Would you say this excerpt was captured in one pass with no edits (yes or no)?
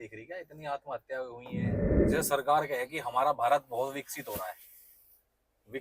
no